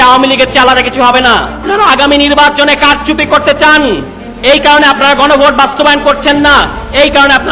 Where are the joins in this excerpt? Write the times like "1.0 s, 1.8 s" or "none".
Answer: 1.6 s